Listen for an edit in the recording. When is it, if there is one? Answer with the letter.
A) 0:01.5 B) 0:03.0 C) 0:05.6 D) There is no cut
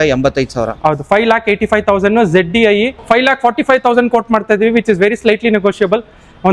B